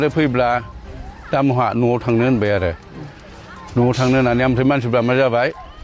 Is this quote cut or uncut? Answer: uncut